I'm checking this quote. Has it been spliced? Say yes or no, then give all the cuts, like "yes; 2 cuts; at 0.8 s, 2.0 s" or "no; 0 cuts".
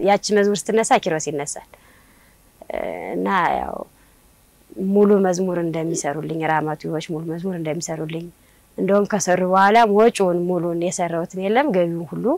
no; 0 cuts